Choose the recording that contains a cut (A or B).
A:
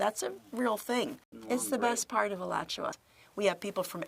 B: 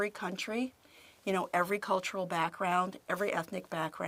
A